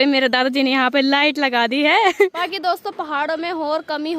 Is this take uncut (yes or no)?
no